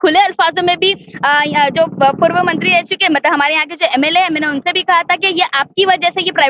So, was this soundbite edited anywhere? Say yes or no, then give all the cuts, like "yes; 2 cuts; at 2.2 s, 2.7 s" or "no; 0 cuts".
no; 0 cuts